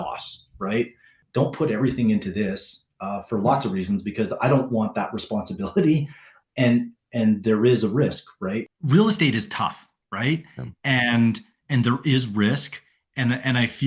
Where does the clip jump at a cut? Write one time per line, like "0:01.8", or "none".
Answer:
0:01.2
0:08.7